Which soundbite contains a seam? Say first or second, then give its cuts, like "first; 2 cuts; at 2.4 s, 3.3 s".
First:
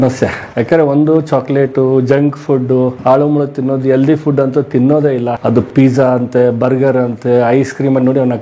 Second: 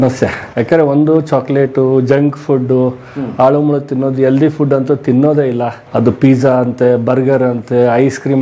first; 2 cuts; at 3.0 s, 5.7 s